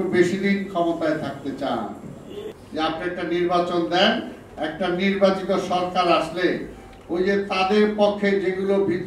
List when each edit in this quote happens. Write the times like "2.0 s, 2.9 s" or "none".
2.6 s